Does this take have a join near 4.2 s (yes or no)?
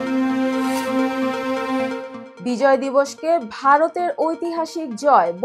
no